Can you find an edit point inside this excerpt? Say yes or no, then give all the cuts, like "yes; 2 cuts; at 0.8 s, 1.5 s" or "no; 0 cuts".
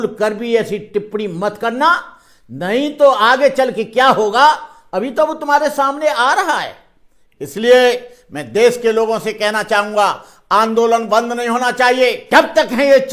yes; 1 cut; at 12.2 s